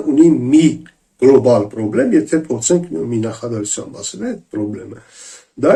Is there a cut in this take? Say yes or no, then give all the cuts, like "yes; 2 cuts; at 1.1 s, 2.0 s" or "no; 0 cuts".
no; 0 cuts